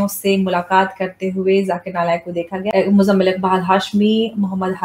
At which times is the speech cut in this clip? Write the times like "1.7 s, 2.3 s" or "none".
2.5 s